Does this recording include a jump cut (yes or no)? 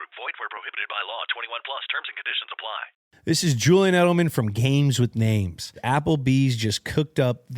yes